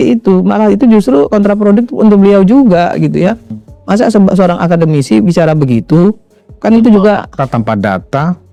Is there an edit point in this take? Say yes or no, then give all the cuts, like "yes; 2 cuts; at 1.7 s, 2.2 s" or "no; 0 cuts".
no; 0 cuts